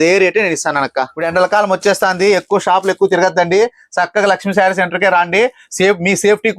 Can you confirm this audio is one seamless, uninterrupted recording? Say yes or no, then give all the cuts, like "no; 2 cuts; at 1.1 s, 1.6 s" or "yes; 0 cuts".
no; 1 cut; at 1.2 s